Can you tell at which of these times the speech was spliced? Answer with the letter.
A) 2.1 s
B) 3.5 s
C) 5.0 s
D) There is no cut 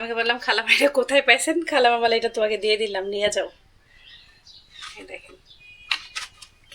D